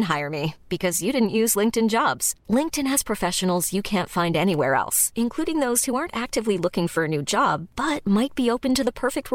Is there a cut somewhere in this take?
no; 0 cuts

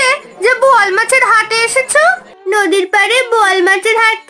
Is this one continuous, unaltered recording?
no; 1 cut; at 2.3 s

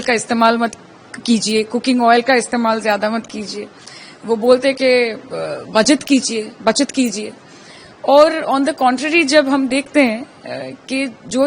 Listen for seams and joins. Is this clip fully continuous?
yes; 0 cuts

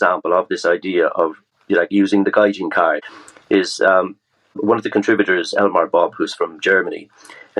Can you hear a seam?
yes; 3 cuts; at 1.5 s, 3.1 s, 4.6 s

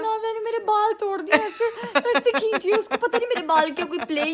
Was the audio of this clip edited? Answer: no; 0 cuts

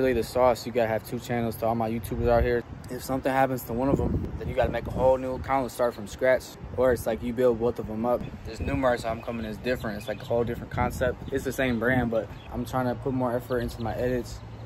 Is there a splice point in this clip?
yes; 5 cuts; at 2.7 s, 4.2 s, 6.6 s, 8.3 s, 12.5 s

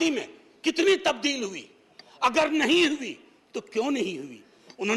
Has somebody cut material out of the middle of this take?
no; 0 cuts

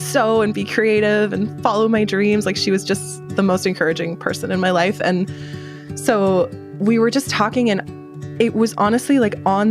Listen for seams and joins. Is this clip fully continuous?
no; 1 cut; at 7.9 s

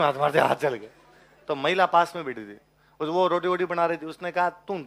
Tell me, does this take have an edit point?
no; 0 cuts

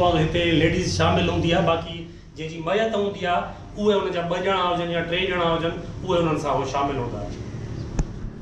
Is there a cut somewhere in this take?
no; 0 cuts

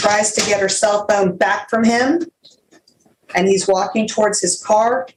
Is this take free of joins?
yes; 0 cuts

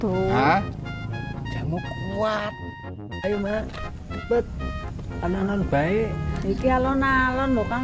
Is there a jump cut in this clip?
yes; 1 cut; at 3.2 s

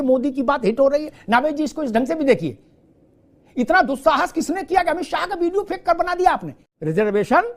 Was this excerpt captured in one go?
no; 1 cut; at 6.5 s

